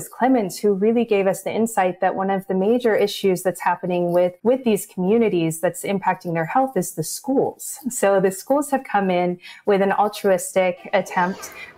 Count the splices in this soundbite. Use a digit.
1